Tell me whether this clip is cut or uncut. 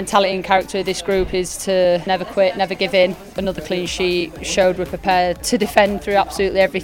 cut